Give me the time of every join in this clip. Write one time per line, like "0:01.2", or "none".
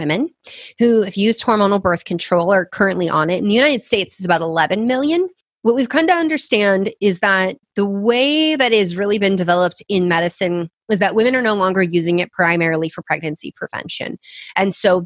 0:05.4
0:07.6